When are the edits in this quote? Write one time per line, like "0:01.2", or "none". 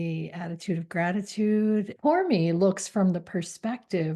0:01.9